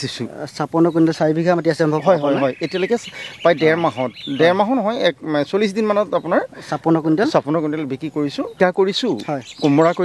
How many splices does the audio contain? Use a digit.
1